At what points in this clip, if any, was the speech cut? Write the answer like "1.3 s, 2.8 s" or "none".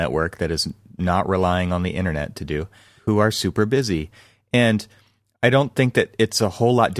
2.9 s